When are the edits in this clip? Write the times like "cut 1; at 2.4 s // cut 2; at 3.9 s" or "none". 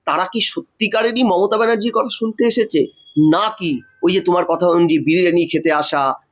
none